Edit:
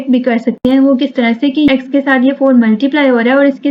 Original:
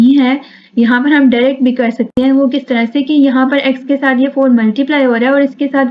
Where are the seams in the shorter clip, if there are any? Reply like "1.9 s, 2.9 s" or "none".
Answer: 1.7 s